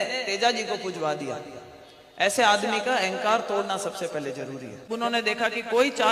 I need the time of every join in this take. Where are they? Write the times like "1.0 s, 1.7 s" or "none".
4.9 s

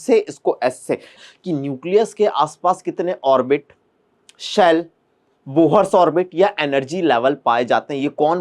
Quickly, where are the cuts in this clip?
1.1 s

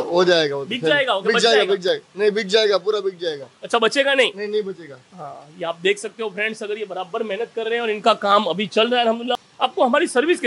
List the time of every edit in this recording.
none

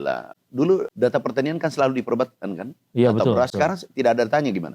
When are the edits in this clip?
0.9 s, 3.5 s

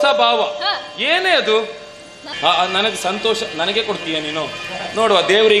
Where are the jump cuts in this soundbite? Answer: 2.3 s

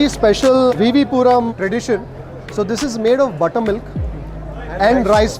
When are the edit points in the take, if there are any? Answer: none

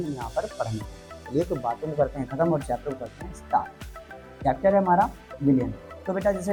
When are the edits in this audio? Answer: none

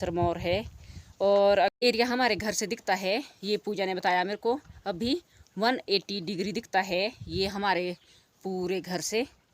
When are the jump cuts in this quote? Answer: 1.7 s

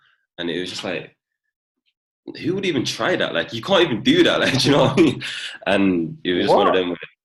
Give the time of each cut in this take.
none

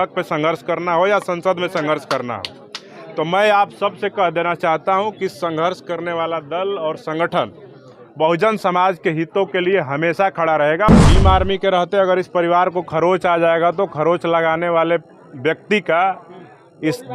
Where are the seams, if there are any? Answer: 10.9 s

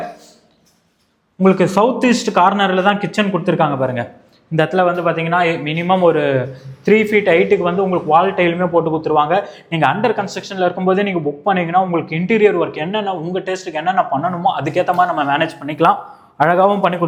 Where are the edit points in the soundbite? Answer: none

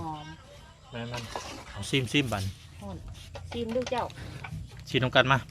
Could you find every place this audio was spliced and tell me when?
1.9 s

